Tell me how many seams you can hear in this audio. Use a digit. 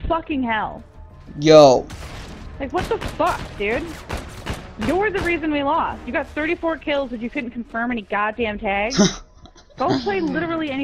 0